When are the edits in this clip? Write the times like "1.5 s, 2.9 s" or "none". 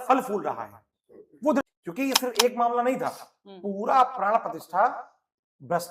1.6 s